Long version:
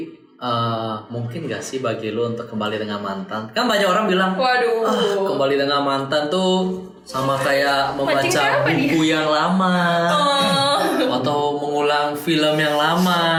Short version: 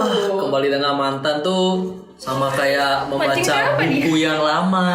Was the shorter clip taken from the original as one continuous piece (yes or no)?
yes